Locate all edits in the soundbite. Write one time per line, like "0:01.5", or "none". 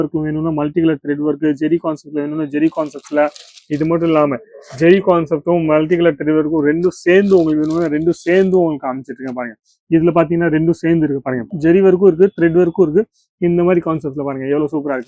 none